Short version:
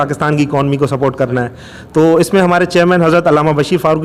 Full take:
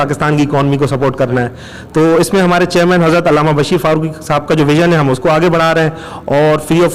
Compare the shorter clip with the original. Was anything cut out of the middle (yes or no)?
no